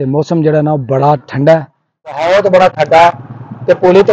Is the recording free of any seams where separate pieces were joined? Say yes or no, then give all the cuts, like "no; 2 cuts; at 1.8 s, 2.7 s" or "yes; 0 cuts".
no; 1 cut; at 2.2 s